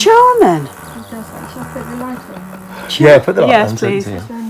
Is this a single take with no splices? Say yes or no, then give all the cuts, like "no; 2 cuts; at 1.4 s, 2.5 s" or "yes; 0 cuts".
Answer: yes; 0 cuts